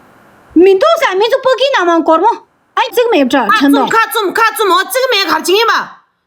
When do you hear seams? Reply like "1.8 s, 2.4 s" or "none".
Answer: 2.9 s